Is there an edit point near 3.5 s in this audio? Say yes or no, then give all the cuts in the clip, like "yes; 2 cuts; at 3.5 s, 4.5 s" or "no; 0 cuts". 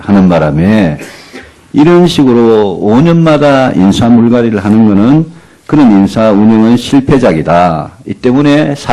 yes; 1 cut; at 3.5 s